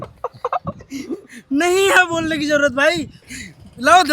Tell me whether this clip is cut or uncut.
cut